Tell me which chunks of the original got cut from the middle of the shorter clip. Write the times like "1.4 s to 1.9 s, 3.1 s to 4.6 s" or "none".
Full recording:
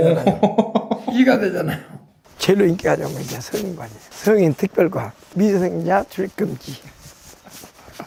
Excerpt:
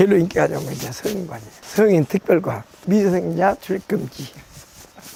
none